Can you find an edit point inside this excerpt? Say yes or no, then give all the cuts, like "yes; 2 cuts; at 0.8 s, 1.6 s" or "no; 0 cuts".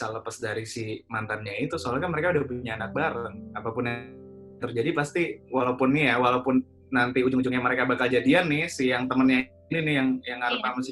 no; 0 cuts